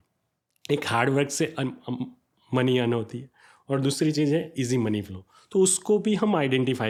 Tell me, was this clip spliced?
no; 0 cuts

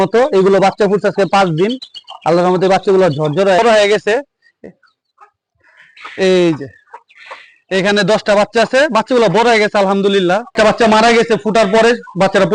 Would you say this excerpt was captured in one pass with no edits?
no; 2 cuts; at 3.6 s, 10.5 s

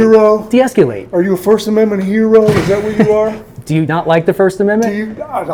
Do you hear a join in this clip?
no; 0 cuts

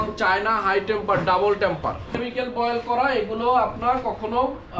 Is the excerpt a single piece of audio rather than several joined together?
no; 1 cut; at 2.2 s

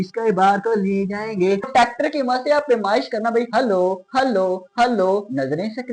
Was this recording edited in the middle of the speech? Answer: yes; 1 cut; at 1.7 s

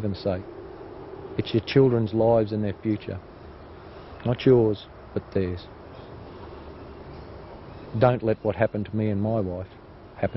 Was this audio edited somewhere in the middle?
no; 0 cuts

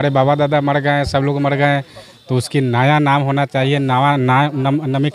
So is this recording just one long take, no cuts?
yes; 0 cuts

